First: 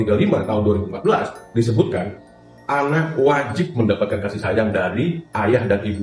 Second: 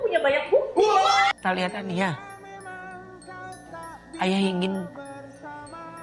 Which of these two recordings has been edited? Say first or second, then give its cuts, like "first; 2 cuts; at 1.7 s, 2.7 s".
second; 1 cut; at 1.3 s